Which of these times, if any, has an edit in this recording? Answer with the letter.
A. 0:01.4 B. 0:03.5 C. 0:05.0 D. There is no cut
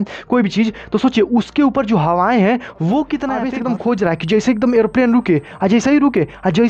B